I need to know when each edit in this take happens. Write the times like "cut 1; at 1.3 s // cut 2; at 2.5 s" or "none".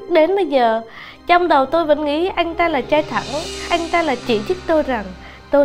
cut 1; at 3.9 s